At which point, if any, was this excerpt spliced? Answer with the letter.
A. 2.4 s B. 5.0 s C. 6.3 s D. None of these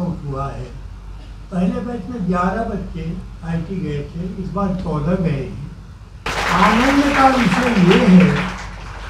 C